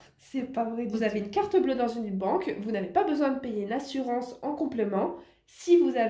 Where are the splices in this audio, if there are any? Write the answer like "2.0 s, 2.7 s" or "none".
1.0 s